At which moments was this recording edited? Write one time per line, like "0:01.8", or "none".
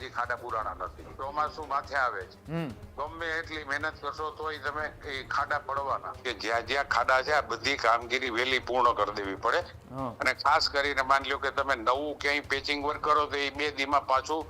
0:01.0
0:06.2